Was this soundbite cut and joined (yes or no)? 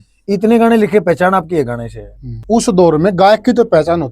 yes